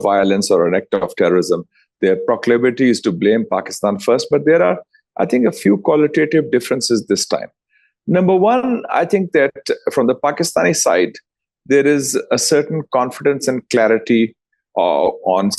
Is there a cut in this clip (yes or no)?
no